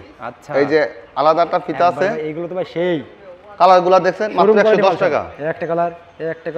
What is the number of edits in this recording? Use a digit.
0